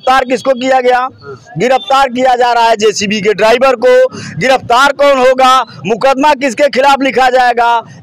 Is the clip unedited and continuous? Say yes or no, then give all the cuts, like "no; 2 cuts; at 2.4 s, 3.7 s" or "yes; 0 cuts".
yes; 0 cuts